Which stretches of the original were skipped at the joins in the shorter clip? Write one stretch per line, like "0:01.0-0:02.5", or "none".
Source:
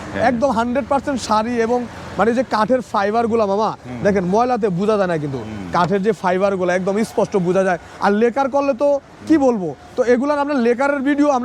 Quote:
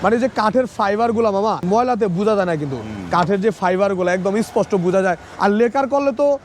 0:03.8-0:04.3